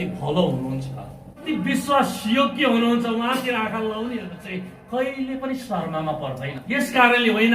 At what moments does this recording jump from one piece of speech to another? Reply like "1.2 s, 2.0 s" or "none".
1.5 s, 6.6 s